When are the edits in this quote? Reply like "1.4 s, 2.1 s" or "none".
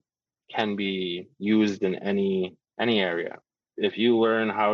2.6 s